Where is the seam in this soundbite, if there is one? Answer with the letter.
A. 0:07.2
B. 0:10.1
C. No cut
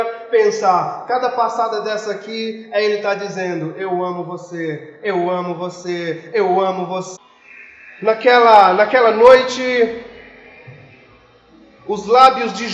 A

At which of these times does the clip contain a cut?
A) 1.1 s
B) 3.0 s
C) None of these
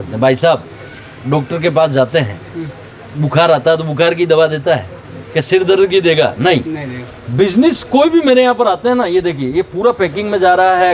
C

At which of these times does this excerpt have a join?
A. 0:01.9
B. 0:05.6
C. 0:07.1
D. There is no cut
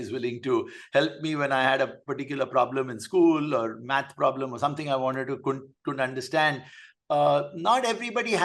D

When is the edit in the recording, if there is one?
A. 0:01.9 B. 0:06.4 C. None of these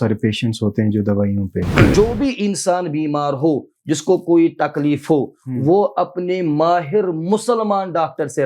A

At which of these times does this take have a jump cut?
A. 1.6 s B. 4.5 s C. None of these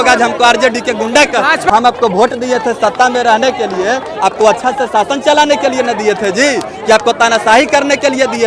A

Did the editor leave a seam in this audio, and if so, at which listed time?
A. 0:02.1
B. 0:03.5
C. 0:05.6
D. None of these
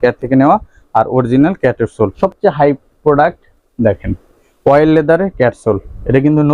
A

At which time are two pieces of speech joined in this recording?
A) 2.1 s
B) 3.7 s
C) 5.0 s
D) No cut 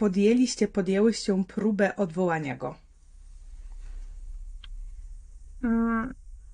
D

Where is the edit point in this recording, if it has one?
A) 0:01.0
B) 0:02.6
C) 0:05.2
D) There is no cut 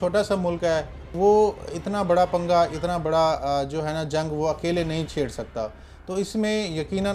A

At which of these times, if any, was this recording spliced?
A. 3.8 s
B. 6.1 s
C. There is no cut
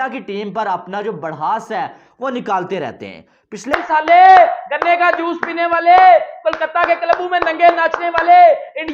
A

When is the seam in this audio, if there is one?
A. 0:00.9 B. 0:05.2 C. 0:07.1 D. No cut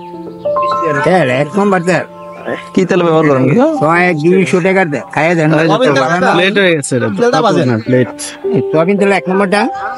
A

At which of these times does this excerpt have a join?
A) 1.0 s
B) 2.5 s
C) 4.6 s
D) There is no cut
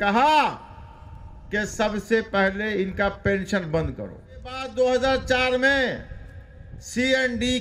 C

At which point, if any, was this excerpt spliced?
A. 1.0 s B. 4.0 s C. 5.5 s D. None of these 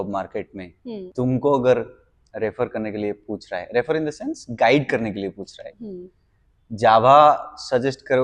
A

